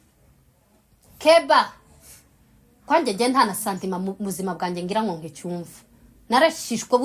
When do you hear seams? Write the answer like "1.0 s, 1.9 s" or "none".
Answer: none